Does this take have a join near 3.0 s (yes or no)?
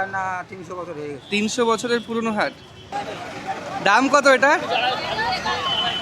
yes